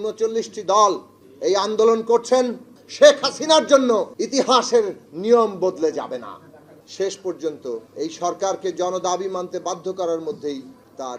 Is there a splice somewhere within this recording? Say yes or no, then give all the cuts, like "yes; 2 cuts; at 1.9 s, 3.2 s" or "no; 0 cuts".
no; 0 cuts